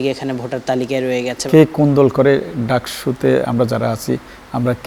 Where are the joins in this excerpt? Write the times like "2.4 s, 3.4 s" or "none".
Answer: 1.4 s